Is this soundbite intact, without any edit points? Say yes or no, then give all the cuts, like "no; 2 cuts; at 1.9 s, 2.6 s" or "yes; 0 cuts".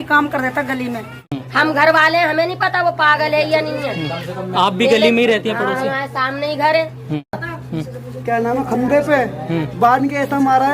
no; 2 cuts; at 1.1 s, 7.4 s